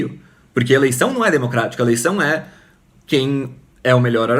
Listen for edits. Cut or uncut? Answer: uncut